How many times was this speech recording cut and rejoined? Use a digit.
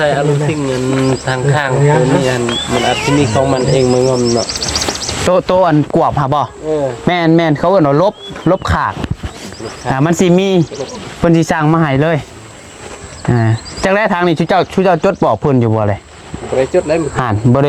0